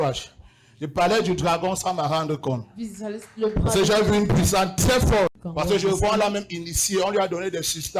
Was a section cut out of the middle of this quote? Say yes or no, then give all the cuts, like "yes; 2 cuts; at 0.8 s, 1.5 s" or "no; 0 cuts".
yes; 1 cut; at 5.4 s